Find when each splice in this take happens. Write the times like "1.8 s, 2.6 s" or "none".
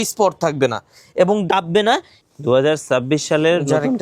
2.1 s